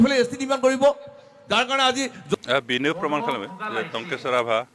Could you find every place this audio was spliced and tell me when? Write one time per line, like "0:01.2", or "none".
0:02.3